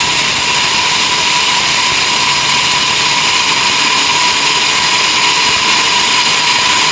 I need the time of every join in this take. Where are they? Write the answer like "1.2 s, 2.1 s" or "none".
none